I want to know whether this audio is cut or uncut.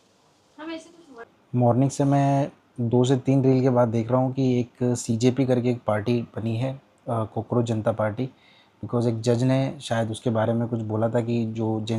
cut